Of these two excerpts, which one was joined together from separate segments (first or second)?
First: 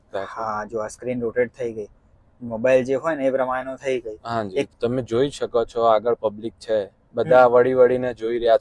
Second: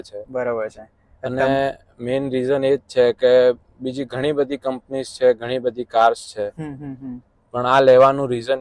first